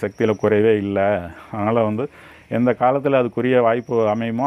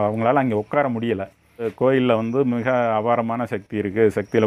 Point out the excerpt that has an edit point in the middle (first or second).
second